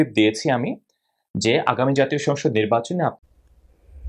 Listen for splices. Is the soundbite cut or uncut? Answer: cut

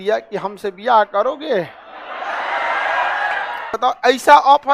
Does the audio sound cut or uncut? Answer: cut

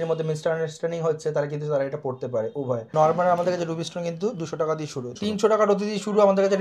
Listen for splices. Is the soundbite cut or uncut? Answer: cut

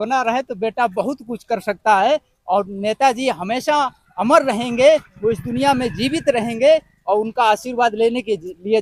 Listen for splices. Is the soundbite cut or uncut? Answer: uncut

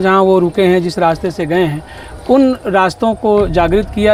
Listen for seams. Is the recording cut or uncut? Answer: uncut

